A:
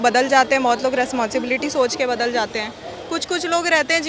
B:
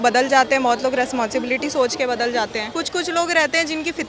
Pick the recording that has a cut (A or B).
B